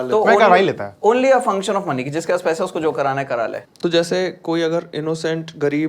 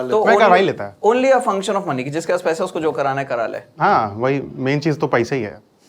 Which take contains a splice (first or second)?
first